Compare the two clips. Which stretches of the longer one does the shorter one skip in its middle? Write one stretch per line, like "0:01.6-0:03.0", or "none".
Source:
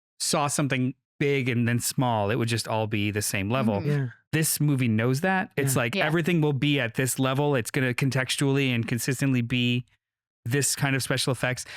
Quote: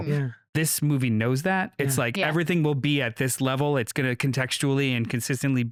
none